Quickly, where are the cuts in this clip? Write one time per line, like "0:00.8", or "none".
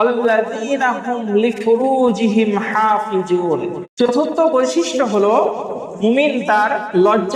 0:03.8